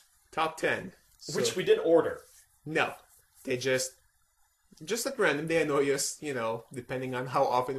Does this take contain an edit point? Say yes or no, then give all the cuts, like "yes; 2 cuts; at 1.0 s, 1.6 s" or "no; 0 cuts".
no; 0 cuts